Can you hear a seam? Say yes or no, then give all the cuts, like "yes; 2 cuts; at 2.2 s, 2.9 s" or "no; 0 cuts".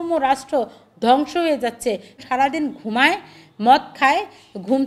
yes; 1 cut; at 2.2 s